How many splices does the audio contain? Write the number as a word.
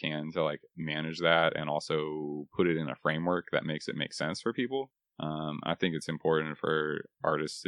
one